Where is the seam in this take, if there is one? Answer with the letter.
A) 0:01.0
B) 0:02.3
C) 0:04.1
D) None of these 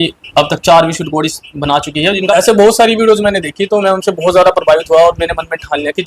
B